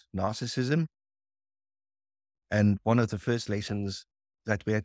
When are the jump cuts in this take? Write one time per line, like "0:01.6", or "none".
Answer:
none